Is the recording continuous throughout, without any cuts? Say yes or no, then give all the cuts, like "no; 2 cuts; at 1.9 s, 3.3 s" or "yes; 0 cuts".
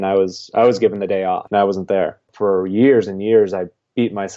no; 2 cuts; at 1.4 s, 2.3 s